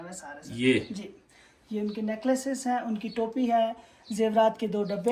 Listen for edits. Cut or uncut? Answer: uncut